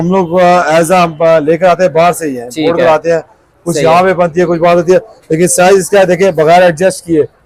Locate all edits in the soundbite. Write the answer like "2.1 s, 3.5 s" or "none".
none